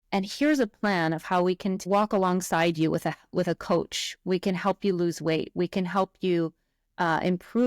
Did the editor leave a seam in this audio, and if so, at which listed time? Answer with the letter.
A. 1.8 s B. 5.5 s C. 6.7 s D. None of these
A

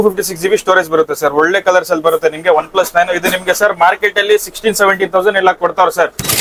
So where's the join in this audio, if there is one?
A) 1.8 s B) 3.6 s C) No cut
C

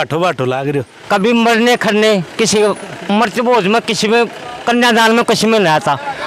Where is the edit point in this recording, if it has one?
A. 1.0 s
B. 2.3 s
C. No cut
A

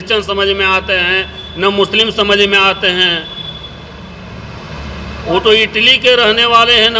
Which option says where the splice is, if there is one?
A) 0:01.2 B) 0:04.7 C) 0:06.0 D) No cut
D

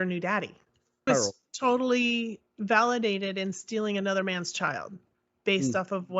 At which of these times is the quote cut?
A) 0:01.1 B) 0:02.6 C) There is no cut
A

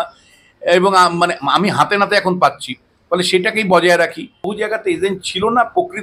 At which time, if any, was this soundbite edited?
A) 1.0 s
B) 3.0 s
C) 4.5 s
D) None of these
C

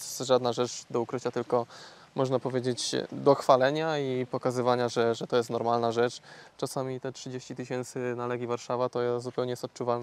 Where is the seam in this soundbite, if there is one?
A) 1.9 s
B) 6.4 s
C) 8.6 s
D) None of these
B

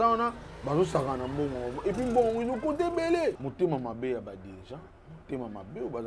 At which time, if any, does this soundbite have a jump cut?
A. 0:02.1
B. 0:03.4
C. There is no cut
B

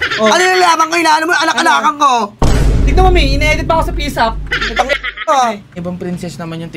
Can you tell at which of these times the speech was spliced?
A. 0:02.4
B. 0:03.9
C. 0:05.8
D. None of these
C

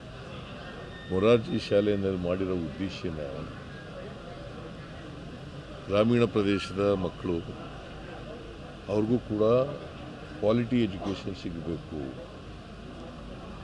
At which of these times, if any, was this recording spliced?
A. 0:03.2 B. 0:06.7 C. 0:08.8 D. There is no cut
D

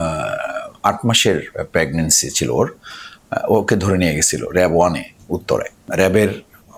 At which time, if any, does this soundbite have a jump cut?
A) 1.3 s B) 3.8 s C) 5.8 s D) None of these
C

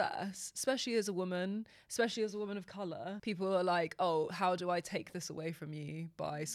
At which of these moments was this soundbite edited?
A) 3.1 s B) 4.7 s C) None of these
A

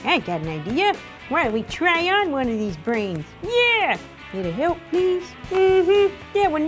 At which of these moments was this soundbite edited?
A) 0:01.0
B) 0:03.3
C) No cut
C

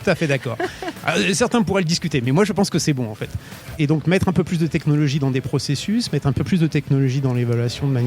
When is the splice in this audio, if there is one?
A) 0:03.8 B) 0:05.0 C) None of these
A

